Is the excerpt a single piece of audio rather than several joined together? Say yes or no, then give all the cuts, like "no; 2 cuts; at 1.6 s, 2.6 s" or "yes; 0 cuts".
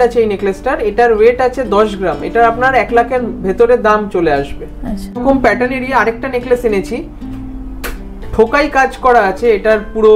yes; 0 cuts